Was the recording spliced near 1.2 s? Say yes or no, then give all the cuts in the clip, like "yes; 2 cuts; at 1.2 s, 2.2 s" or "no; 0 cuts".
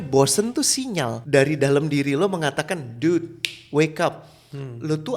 yes; 1 cut; at 1.2 s